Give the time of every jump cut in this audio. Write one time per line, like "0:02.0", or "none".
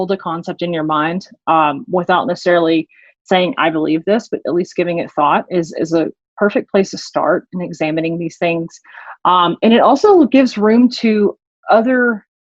none